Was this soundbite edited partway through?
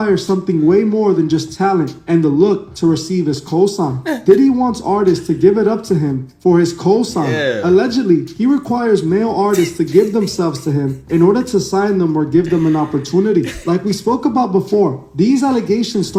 no; 0 cuts

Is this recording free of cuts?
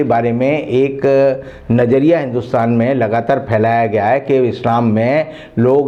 yes; 0 cuts

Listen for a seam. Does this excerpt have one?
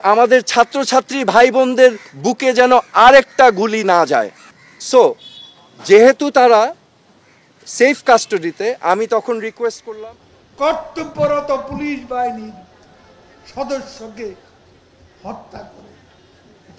yes; 1 cut; at 9.8 s

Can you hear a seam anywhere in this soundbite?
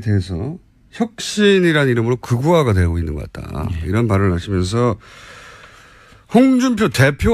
no; 0 cuts

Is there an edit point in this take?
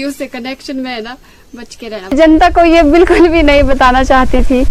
yes; 1 cut; at 2.1 s

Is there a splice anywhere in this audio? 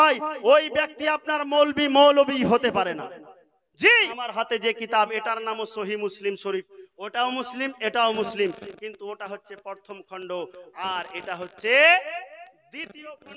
yes; 1 cut; at 4.1 s

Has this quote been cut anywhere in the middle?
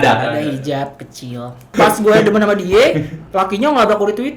yes; 1 cut; at 1.7 s

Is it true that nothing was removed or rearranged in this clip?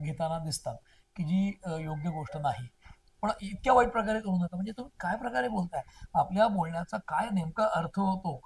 no; 1 cut; at 3.1 s

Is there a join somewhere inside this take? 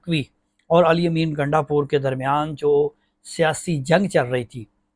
no; 0 cuts

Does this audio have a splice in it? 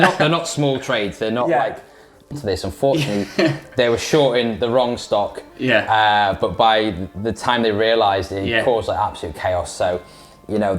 yes; 1 cut; at 2.3 s

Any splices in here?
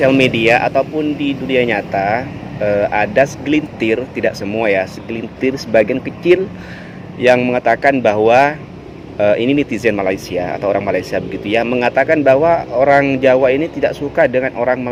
no; 0 cuts

